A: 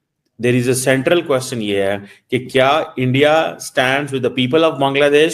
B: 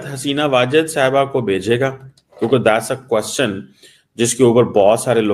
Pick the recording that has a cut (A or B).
A